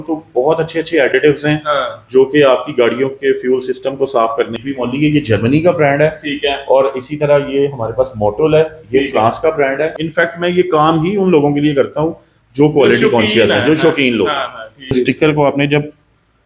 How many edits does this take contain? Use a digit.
3